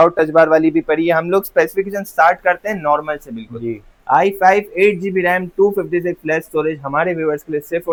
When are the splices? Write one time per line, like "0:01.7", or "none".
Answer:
none